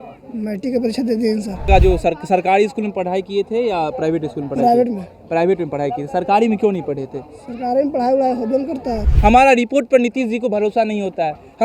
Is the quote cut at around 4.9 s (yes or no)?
no